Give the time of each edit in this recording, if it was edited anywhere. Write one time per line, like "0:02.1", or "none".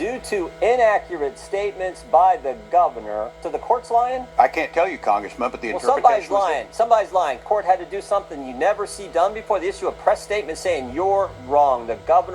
0:03.5
0:04.3
0:07.4